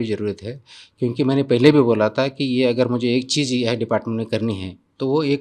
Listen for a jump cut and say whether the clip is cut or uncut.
uncut